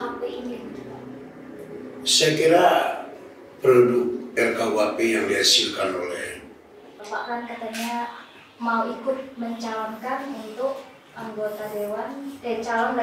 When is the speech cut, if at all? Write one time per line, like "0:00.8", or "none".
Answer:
0:07.1